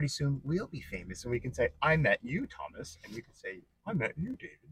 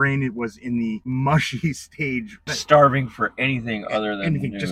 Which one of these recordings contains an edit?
second; 2 cuts; at 1.0 s, 2.5 s

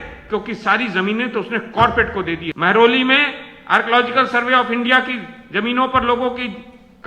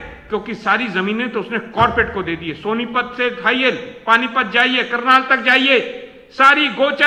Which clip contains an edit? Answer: first; 1 cut; at 2.5 s

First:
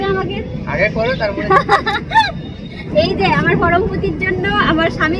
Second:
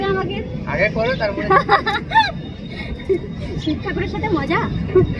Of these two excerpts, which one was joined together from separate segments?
first; 1 cut; at 2.8 s

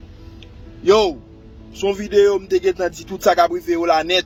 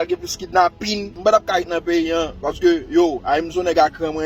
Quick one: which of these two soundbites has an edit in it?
second; 1 cut; at 1.1 s

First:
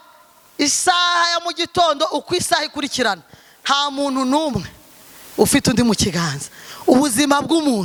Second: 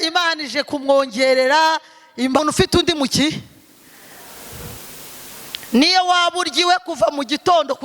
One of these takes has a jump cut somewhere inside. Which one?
second; 1 cut; at 2.4 s

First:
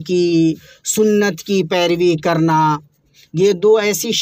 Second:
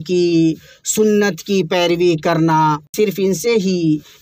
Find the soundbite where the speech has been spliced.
second; 1 cut; at 2.9 s

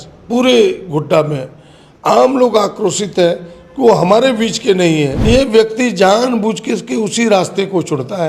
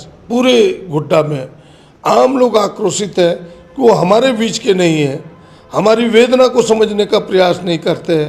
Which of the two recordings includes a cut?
first; 1 cut; at 5.2 s

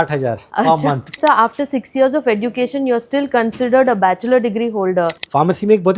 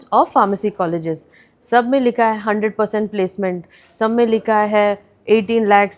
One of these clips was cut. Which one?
first; 2 cuts; at 0.9 s, 5.1 s

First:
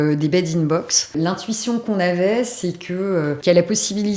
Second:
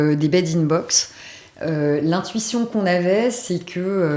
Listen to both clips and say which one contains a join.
first; 2 cuts; at 1.1 s, 3.4 s

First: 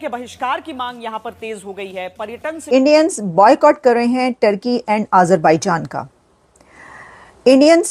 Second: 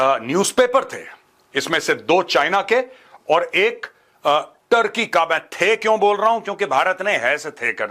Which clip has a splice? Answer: first; 1 cut; at 2.6 s

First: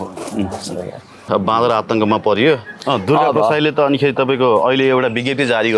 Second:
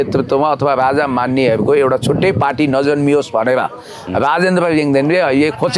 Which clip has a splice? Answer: first; 2 cuts; at 1.2 s, 2.8 s

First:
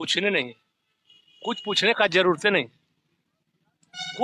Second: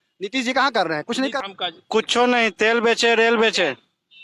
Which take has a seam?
second; 1 cut; at 1.5 s

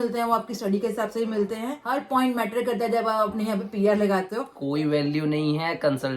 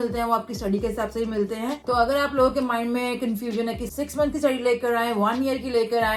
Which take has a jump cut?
first; 2 cuts; at 1.8 s, 4.5 s

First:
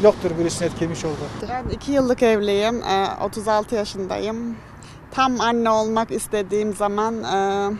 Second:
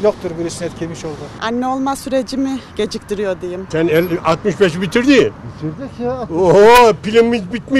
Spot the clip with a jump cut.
second; 2 cuts; at 1.3 s, 3.7 s

